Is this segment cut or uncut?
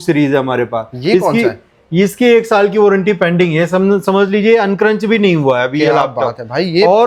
uncut